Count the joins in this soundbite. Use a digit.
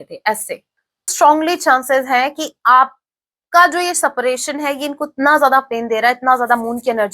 1